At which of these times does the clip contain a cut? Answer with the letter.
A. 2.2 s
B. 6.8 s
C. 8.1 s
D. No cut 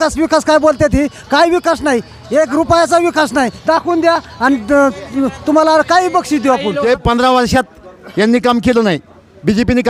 B